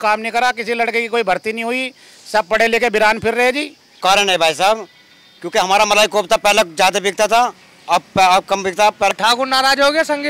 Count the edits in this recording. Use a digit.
2